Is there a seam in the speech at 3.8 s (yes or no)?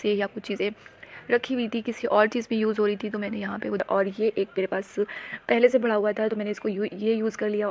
yes